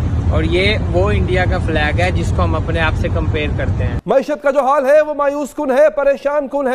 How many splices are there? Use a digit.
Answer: 1